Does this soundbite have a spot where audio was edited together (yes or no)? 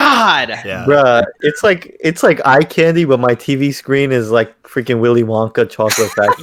no